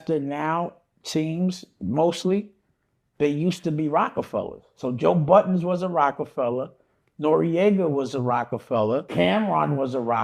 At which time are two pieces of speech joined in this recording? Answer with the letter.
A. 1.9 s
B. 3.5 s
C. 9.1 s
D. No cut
C